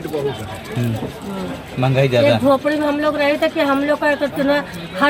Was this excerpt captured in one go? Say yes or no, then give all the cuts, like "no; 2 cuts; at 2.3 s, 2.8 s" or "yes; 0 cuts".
yes; 0 cuts